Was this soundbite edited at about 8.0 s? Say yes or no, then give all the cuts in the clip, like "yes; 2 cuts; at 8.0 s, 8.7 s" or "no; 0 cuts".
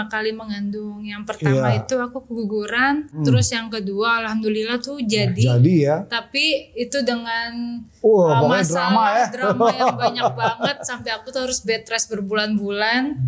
no; 1 cut; at 3.2 s